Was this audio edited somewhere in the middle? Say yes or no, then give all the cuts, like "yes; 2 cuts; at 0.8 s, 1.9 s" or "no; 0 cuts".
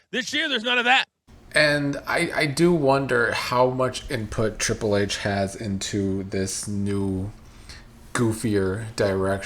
yes; 1 cut; at 1.2 s